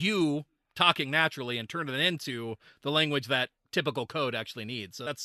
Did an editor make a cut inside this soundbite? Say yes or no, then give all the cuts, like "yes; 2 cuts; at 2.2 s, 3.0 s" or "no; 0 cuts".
no; 0 cuts